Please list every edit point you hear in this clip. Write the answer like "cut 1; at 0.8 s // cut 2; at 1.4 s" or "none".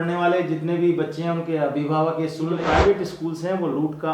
cut 1; at 2.6 s